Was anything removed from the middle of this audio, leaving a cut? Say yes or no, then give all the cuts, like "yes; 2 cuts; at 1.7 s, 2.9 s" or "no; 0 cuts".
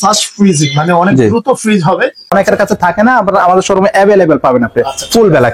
yes; 1 cut; at 2.3 s